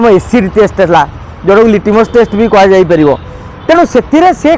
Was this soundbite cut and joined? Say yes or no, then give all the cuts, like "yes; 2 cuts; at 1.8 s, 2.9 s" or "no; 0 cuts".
no; 0 cuts